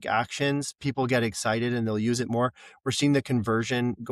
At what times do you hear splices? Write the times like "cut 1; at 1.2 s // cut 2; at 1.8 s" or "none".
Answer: none